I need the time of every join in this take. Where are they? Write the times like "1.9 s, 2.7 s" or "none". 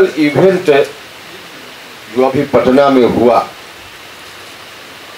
none

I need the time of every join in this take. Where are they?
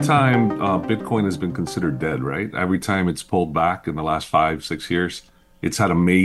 none

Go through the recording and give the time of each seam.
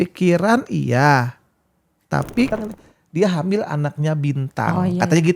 2.5 s

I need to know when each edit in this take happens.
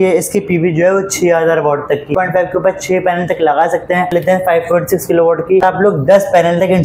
2.1 s, 4.1 s, 5.6 s

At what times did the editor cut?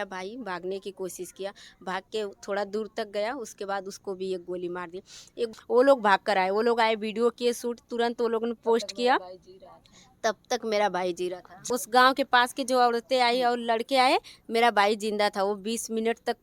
5.5 s, 11.6 s

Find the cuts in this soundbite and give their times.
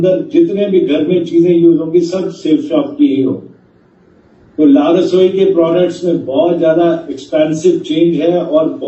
none

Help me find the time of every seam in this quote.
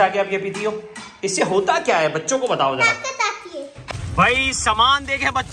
3.7 s

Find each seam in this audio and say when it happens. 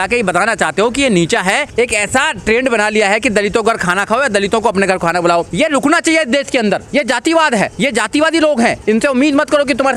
1.7 s, 5.5 s, 6.8 s, 7.7 s, 8.8 s

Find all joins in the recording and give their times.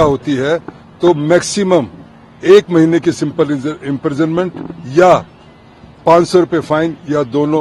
none

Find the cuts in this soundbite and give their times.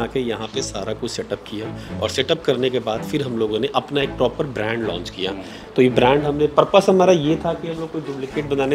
none

